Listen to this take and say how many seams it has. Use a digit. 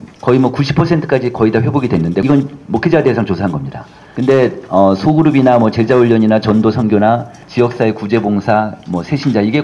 1